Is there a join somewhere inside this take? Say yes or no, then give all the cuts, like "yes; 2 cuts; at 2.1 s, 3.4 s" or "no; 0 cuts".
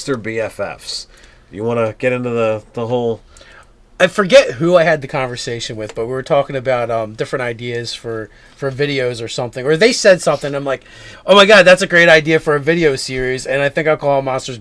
yes; 1 cut; at 7.4 s